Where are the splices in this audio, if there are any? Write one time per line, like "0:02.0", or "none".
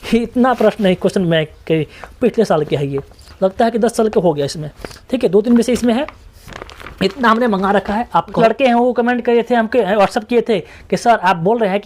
0:08.3